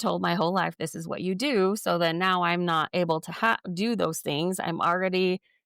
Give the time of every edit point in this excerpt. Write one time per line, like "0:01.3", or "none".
none